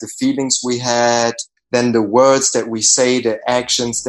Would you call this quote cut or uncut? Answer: cut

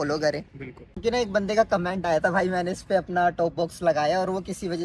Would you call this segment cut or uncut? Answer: cut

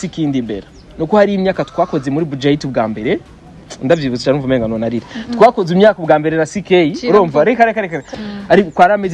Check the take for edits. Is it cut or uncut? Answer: cut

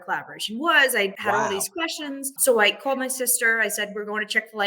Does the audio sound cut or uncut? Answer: cut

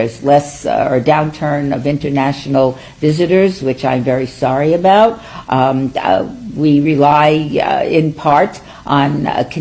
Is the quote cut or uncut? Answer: cut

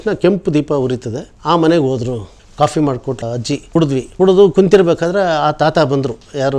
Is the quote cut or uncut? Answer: cut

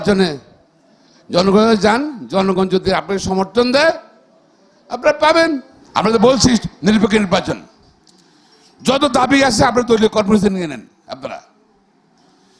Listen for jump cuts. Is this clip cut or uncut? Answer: cut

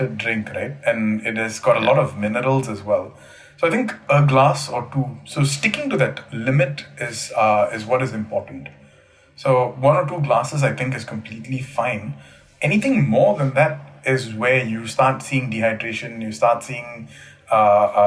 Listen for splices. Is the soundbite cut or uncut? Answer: uncut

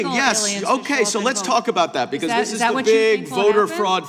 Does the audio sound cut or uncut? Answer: uncut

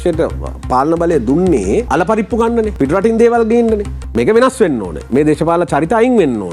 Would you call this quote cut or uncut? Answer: cut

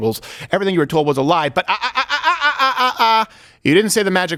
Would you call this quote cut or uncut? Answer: uncut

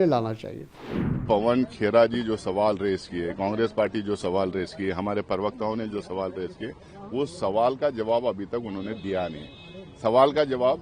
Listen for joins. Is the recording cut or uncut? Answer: cut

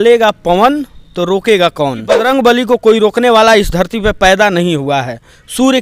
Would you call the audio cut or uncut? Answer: cut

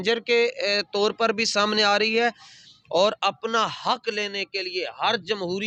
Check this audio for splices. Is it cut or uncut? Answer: uncut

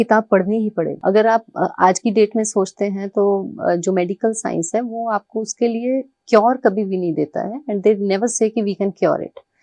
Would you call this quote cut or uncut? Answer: cut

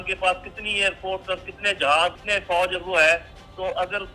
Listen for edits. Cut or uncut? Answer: cut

